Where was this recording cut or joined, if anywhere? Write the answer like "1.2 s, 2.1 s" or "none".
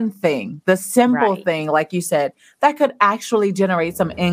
none